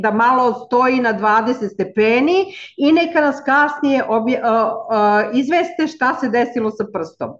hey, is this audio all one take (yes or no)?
yes